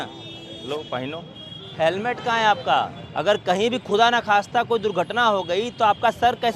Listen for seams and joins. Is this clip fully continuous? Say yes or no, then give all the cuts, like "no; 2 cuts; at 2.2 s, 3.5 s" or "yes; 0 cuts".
no; 2 cuts; at 1.7 s, 3.0 s